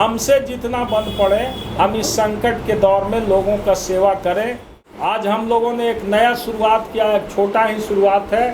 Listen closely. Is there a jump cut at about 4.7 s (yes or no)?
yes